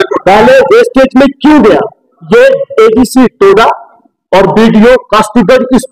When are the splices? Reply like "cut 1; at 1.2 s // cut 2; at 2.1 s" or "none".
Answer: none